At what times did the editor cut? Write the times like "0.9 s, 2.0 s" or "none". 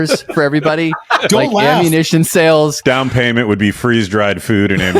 2.7 s